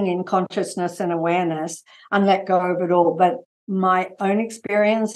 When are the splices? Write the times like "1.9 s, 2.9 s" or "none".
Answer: none